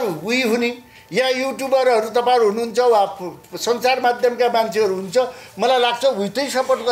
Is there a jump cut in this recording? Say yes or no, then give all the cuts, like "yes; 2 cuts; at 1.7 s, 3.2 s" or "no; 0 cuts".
no; 0 cuts